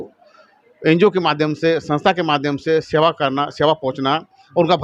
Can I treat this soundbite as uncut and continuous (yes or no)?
yes